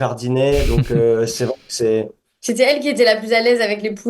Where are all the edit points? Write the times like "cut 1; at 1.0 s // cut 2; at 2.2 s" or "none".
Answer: none